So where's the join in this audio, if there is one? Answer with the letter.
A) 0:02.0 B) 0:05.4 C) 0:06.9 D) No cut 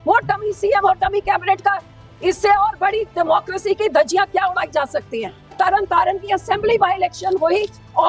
B